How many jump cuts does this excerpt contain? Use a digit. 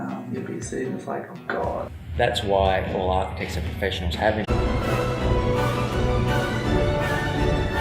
0